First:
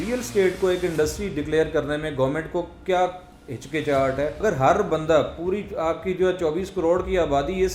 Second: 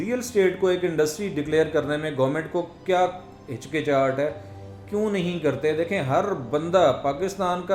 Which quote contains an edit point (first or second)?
first